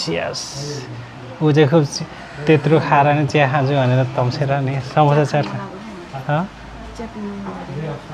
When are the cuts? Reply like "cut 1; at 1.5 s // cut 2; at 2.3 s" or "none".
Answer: none